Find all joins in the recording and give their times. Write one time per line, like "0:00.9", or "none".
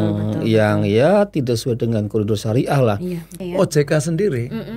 0:03.4